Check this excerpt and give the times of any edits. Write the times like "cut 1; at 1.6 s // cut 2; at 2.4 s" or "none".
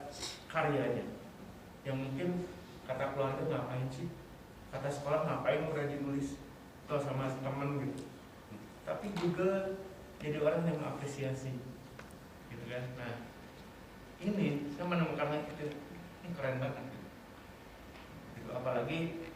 none